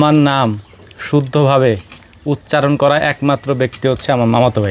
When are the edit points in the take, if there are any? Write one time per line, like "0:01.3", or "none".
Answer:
none